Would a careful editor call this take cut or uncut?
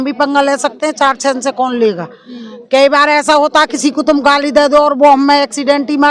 uncut